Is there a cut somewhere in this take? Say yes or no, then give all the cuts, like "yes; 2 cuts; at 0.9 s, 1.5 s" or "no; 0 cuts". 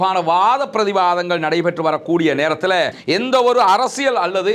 yes; 1 cut; at 3.0 s